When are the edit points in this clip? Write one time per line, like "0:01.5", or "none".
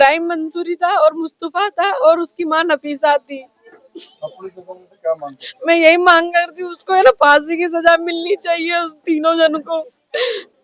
none